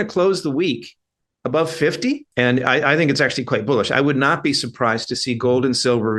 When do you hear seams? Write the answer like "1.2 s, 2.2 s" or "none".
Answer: 2.3 s

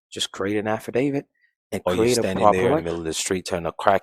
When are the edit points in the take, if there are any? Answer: 2.9 s

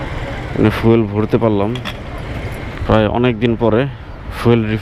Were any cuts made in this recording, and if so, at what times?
2.7 s

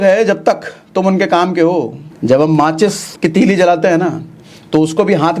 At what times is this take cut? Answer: 2.0 s, 3.1 s

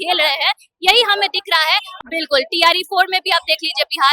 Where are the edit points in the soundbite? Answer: 1.9 s

